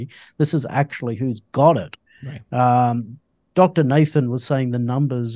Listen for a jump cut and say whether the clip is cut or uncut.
uncut